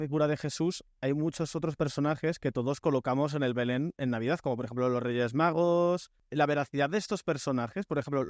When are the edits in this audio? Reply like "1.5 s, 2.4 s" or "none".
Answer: 6.2 s